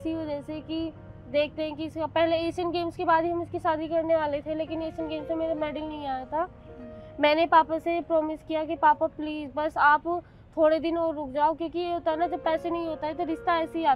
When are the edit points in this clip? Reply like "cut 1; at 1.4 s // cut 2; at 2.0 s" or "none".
none